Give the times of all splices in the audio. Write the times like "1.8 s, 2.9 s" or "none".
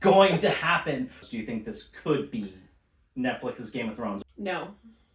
1.2 s, 4.2 s